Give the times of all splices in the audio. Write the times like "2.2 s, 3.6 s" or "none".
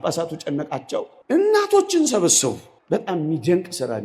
1.2 s, 2.7 s